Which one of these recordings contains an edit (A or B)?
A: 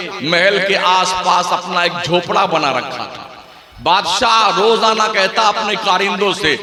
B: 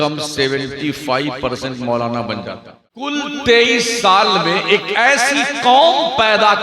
B